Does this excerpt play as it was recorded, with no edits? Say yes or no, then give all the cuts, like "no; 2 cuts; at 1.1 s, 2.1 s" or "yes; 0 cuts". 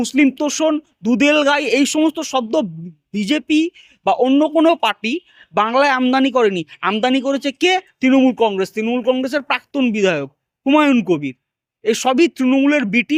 yes; 0 cuts